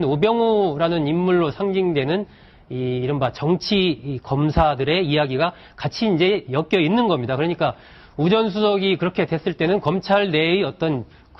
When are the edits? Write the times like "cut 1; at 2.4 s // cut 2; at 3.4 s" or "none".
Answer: none